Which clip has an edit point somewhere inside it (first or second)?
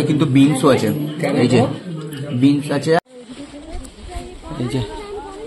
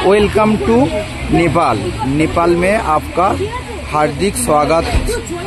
first